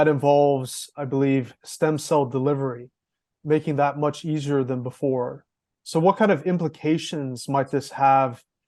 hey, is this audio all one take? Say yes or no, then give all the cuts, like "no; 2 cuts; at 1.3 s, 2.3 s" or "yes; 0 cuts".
yes; 0 cuts